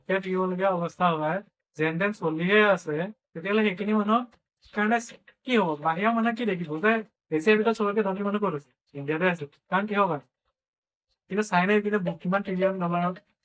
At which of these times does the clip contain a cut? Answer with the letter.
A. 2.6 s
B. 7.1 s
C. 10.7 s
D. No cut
B